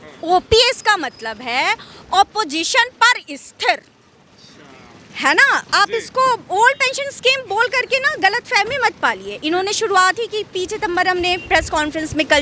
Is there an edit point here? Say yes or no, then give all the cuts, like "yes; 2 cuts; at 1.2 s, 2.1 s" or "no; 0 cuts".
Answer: no; 0 cuts